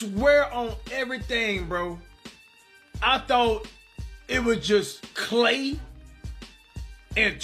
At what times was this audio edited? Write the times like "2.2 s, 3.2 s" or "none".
none